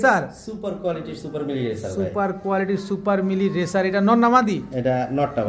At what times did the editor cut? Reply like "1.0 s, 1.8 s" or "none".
none